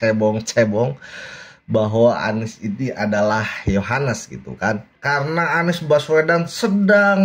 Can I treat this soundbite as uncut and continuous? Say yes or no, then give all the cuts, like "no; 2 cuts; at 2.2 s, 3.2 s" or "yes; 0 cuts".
no; 1 cut; at 4.9 s